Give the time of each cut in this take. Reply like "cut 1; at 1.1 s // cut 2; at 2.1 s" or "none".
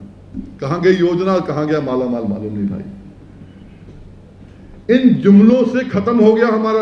none